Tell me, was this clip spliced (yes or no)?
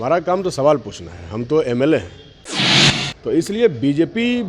yes